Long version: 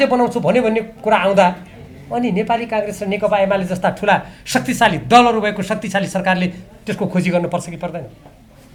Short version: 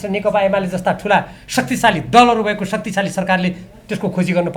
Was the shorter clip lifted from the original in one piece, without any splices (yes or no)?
yes